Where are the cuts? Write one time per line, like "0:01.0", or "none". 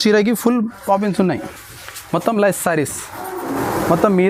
none